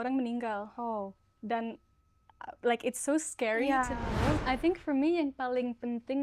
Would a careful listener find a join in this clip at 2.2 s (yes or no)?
no